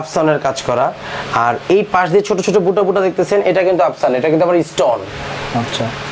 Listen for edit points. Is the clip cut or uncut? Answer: uncut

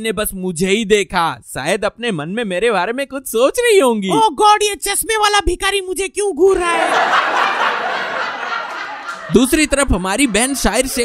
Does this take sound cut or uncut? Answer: uncut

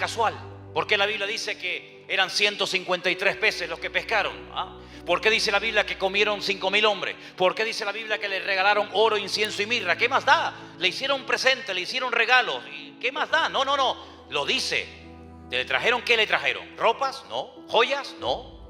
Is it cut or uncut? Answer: uncut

